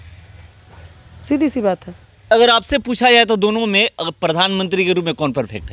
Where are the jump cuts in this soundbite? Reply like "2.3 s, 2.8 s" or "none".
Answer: none